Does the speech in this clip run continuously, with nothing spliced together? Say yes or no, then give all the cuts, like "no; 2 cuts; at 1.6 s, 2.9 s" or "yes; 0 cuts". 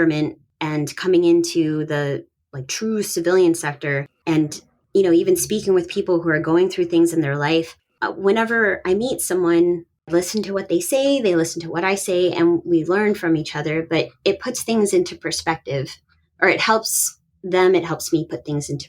no; 1 cut; at 10.1 s